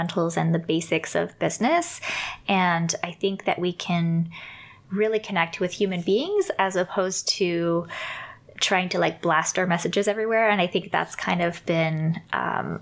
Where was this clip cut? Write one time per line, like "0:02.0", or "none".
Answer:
none